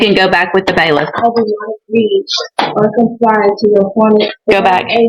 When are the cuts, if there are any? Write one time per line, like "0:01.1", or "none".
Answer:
none